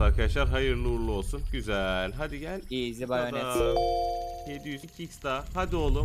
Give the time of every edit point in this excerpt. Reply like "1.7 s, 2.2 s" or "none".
4.9 s